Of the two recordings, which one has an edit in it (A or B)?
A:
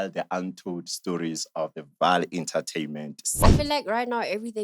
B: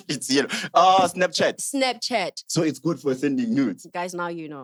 A